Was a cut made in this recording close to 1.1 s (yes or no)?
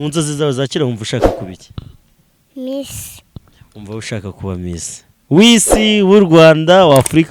no